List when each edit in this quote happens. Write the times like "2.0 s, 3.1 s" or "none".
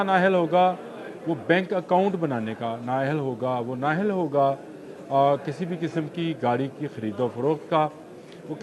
none